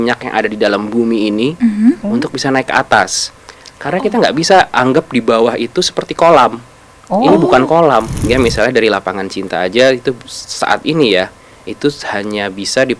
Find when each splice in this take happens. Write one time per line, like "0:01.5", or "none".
0:08.2